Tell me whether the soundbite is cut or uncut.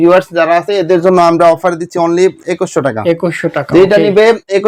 uncut